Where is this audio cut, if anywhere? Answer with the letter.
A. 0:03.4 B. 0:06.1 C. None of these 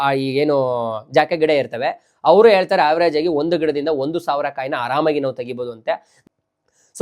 B